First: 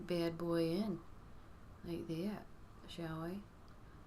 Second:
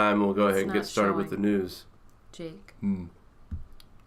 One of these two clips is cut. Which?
first; 1 cut; at 1.9 s

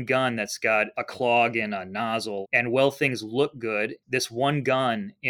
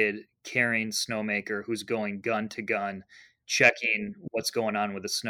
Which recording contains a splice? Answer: first; 3 cuts; at 0.9 s, 2.4 s, 4.0 s

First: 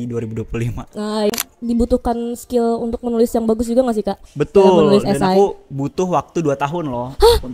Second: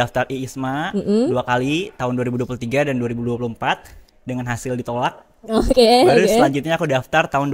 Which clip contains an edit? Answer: first; 1 cut; at 1.3 s

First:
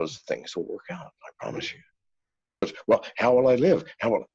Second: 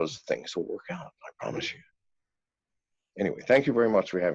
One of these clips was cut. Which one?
first; 1 cut; at 2.6 s

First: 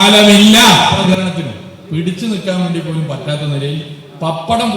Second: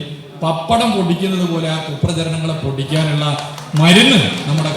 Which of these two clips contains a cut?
first; 1 cut; at 1.0 s

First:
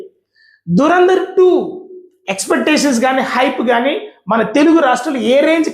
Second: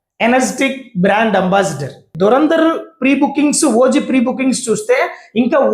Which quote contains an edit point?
second; 1 cut; at 2.1 s

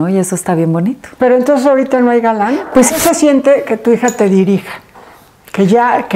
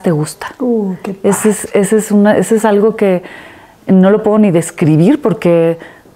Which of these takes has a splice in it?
first; 1 cut; at 2.9 s

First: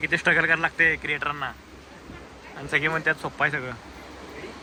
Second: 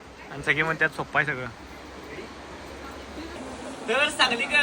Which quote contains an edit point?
second; 1 cut; at 3.4 s

